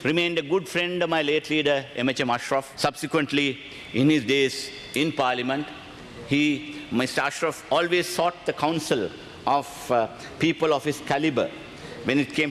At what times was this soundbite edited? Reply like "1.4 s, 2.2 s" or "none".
none